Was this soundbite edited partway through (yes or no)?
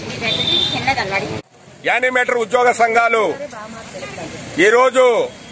yes